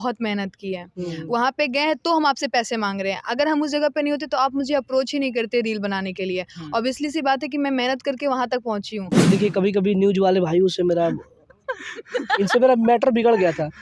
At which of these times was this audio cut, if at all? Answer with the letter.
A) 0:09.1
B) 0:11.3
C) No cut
A